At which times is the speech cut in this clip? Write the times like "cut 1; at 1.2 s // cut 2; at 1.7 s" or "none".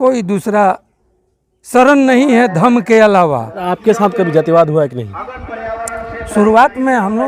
cut 1; at 3.7 s